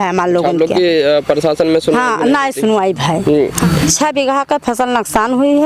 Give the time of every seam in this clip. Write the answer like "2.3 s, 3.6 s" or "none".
3.6 s